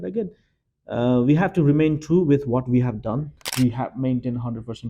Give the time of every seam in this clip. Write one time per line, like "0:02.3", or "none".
0:03.4